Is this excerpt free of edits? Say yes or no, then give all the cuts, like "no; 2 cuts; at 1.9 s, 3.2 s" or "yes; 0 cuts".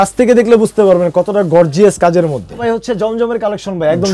no; 1 cut; at 2.6 s